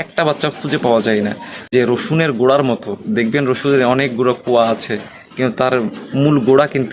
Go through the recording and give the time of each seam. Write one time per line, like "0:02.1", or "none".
0:01.5